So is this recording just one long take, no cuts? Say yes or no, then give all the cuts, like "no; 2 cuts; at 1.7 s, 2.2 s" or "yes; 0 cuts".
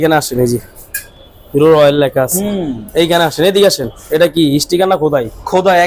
yes; 0 cuts